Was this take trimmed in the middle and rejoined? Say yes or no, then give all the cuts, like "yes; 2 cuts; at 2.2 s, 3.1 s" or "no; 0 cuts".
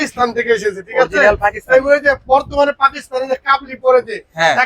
no; 0 cuts